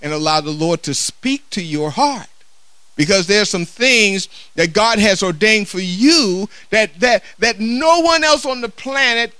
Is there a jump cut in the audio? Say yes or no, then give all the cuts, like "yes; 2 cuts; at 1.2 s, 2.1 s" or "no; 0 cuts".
no; 0 cuts